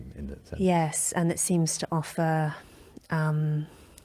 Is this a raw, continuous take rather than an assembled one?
yes; 0 cuts

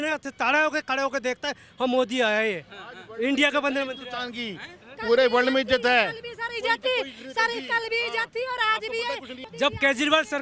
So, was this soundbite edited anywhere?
no; 0 cuts

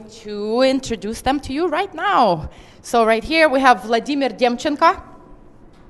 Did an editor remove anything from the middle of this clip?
yes; 1 cut; at 3.7 s

